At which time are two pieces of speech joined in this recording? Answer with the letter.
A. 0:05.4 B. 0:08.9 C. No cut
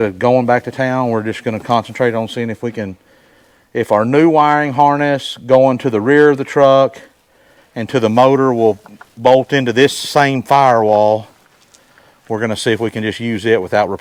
C